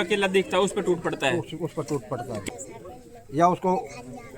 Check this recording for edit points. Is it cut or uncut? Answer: cut